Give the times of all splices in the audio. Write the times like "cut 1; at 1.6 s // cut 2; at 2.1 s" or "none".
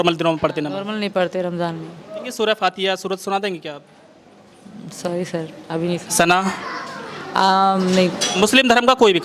cut 1; at 2.3 s // cut 2; at 8.3 s